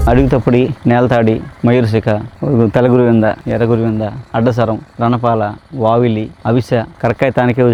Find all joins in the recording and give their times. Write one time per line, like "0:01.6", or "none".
none